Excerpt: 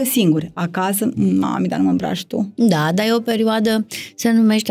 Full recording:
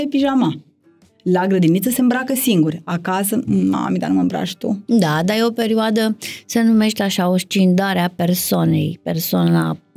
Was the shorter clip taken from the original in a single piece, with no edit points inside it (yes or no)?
yes